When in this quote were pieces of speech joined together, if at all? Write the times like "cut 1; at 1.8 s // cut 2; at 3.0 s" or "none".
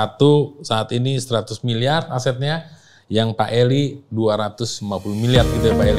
none